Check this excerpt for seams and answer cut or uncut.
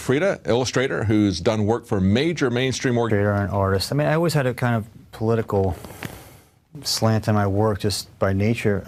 uncut